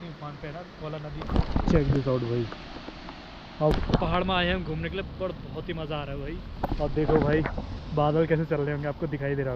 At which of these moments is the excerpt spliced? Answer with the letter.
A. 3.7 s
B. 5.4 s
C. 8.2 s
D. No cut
A